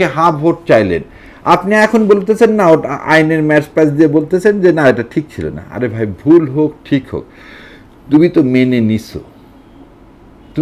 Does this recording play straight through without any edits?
yes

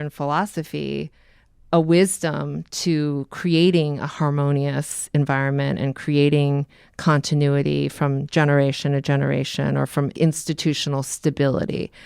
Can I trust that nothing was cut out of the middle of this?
no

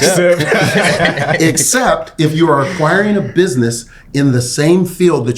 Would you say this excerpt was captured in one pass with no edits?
yes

